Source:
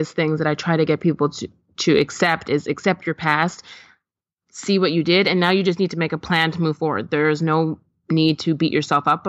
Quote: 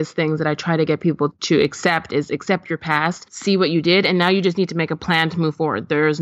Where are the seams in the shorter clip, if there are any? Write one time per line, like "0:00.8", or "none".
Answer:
0:01.4
0:03.3